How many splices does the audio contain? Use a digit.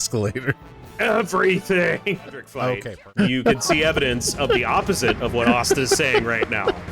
1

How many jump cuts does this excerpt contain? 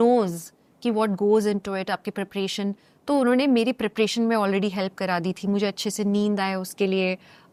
0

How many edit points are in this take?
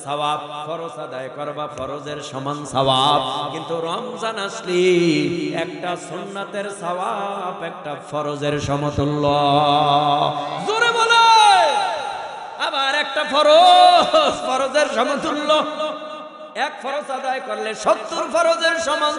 1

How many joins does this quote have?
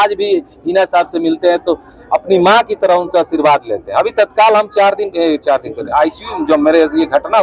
0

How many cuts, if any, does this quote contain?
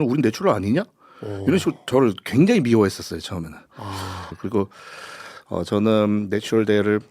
1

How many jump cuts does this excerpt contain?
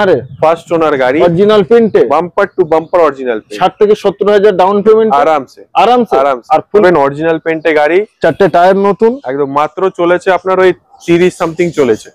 1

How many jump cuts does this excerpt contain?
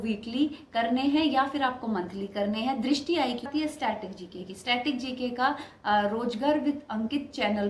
1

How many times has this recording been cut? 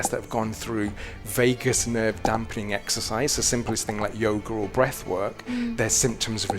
0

